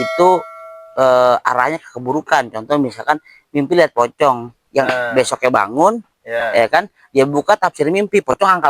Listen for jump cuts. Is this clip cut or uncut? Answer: uncut